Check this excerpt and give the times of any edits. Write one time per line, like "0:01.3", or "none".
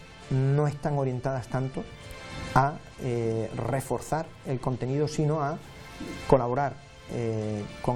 none